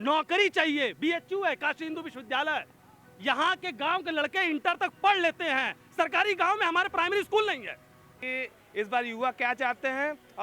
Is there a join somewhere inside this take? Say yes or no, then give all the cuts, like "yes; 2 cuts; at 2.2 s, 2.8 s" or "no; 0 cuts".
yes; 1 cut; at 8.2 s